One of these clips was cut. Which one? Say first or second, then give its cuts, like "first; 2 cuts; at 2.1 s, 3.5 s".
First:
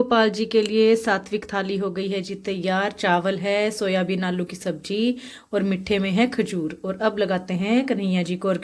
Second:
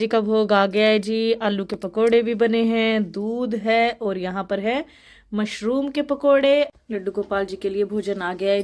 second; 1 cut; at 6.7 s